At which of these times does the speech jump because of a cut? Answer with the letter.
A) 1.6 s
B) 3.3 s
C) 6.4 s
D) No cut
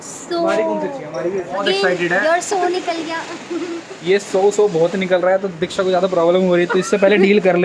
A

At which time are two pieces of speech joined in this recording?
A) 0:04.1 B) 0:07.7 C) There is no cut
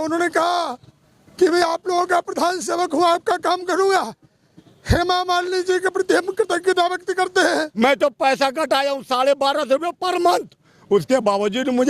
B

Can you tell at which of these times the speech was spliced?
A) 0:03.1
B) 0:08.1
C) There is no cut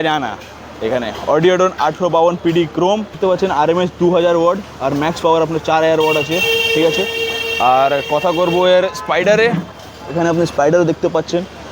A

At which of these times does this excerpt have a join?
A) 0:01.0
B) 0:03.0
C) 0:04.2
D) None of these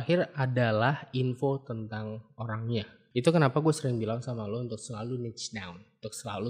B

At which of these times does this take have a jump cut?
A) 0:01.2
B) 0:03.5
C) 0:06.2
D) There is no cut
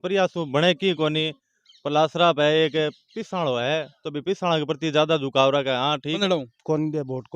C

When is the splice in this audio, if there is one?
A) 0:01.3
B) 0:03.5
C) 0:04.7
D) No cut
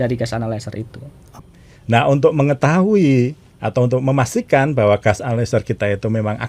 A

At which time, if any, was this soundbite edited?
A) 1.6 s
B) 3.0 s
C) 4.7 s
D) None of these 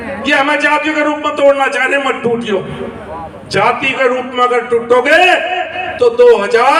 D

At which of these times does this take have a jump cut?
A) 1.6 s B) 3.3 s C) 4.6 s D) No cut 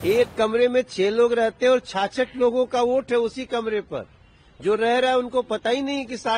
D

